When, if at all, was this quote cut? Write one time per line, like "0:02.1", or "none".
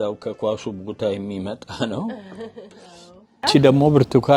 0:03.5